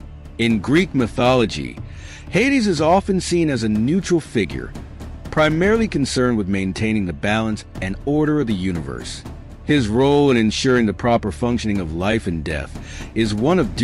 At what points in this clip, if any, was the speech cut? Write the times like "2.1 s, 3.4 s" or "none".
6.3 s